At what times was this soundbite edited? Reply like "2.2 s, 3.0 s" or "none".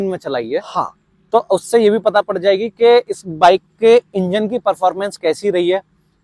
none